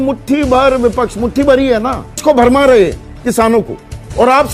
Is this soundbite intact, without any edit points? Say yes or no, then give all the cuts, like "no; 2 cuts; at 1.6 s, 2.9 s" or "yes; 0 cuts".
no; 1 cut; at 2.2 s